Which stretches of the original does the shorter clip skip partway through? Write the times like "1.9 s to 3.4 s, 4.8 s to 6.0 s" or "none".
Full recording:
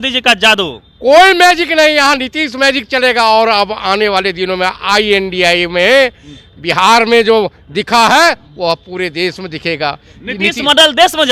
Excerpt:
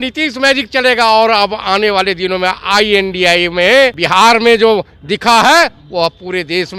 6.2 s to 6.7 s